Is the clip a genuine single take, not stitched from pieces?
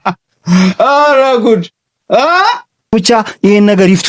no; 1 cut; at 2.9 s

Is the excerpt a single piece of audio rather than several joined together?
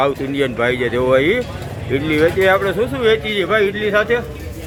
yes; 0 cuts

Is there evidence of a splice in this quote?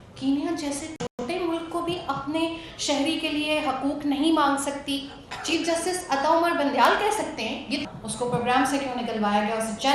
yes; 1 cut; at 7.8 s

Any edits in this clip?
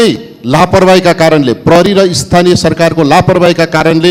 no; 0 cuts

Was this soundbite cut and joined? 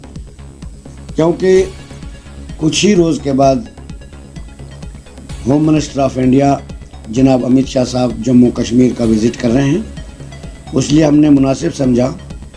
yes; 2 cuts; at 3.7 s, 5.4 s

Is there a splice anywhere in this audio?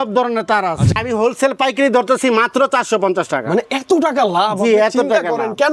yes; 1 cut; at 0.9 s

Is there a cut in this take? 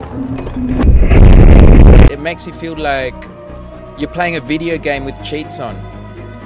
yes; 1 cut; at 2.1 s

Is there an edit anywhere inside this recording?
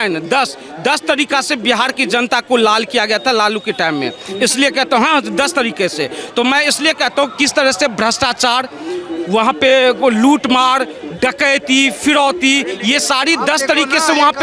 no; 0 cuts

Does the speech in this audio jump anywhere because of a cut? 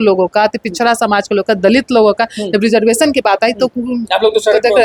no; 0 cuts

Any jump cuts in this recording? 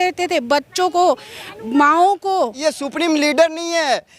yes; 1 cut; at 2.6 s

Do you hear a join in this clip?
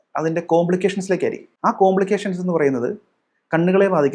yes; 1 cut; at 1.5 s

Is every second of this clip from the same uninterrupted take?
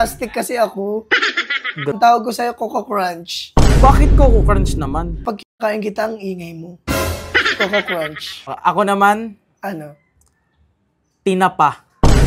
no; 3 cuts; at 2.0 s, 5.2 s, 8.6 s

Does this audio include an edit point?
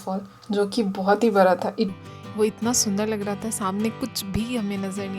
yes; 1 cut; at 1.9 s

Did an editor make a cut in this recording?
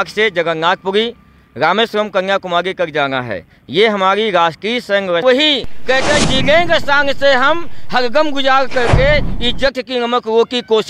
yes; 1 cut; at 5.2 s

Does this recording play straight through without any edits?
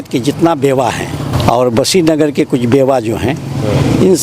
no; 1 cut; at 1.3 s

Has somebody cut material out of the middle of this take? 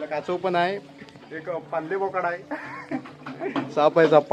no; 0 cuts

